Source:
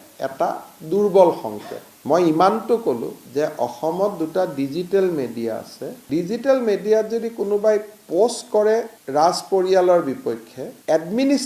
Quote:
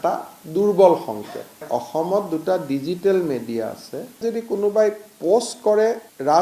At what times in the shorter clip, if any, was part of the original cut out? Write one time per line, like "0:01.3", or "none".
0:01.6
0:04.2